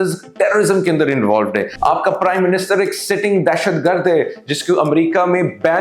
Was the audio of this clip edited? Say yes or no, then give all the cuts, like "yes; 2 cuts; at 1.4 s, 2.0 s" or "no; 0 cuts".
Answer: yes; 1 cut; at 1.7 s